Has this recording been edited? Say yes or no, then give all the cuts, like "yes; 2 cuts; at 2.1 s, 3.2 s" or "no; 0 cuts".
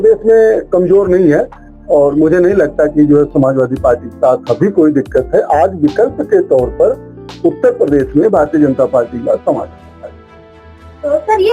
no; 0 cuts